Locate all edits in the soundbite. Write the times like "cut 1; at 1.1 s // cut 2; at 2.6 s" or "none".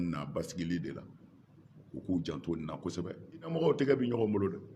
cut 1; at 3.5 s